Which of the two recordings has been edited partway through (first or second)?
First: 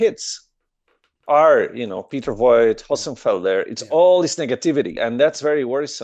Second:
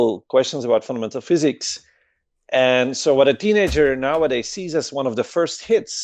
first